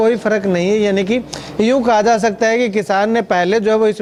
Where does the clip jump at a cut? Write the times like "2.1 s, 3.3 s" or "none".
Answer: none